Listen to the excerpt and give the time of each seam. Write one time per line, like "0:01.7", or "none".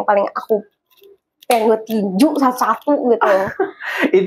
none